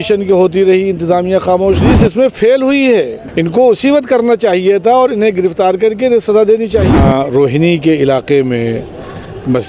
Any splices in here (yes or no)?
yes